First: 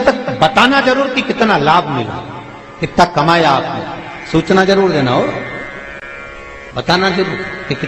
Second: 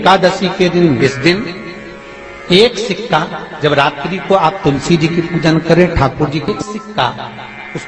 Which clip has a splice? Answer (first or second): second